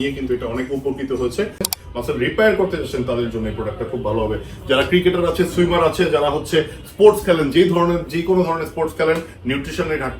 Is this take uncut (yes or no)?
no